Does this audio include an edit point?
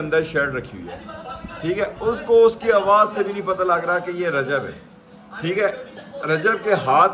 no; 0 cuts

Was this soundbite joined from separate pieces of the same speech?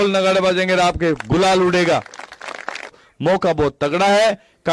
yes; 1 cut; at 3.1 s

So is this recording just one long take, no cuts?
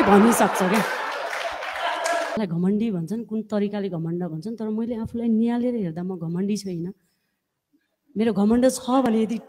no; 1 cut; at 2.4 s

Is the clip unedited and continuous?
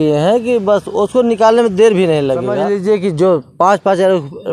no; 1 cut; at 2.6 s

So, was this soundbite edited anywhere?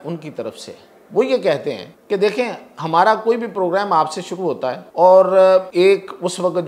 yes; 3 cuts; at 1.9 s, 4.8 s, 5.7 s

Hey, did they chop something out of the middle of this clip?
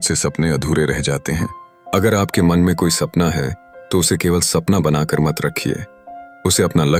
no; 0 cuts

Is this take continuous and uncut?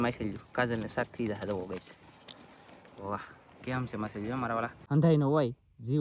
no; 1 cut; at 4.8 s

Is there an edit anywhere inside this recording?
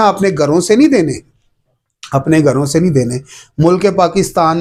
no; 0 cuts

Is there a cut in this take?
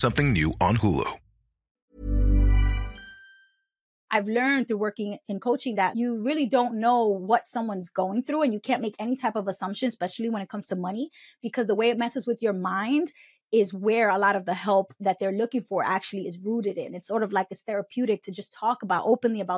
yes; 2 cuts; at 1.9 s, 4.0 s

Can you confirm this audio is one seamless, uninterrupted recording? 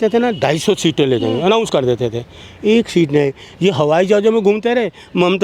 yes; 0 cuts

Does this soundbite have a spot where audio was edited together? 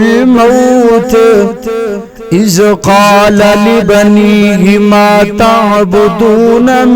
no; 0 cuts

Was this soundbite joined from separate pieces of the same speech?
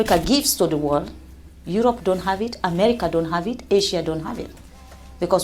no; 0 cuts

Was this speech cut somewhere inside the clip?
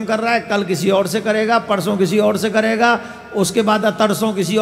no; 0 cuts

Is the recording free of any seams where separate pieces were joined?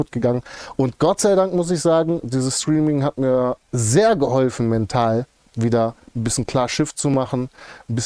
yes; 0 cuts

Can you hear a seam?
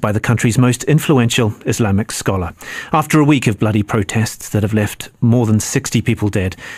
no; 0 cuts

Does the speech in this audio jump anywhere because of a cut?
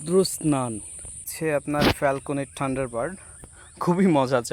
yes; 1 cut; at 1.2 s

